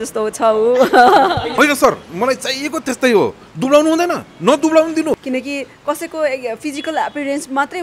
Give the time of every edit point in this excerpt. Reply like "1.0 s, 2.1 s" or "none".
1.5 s, 5.2 s